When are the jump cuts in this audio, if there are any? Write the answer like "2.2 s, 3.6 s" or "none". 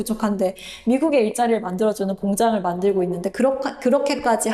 none